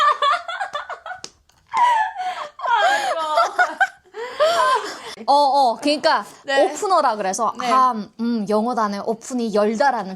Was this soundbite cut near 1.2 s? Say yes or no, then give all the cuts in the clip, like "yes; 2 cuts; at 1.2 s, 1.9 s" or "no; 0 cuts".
no; 1 cut; at 5.1 s